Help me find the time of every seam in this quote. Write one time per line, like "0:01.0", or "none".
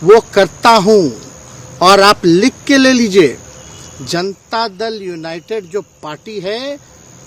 none